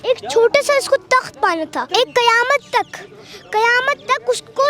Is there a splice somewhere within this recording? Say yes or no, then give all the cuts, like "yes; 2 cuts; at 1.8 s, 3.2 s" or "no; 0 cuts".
yes; 1 cut; at 1.8 s